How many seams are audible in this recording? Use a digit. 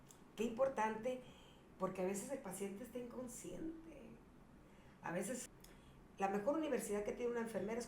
1